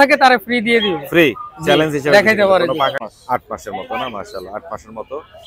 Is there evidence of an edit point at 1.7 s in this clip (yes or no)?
no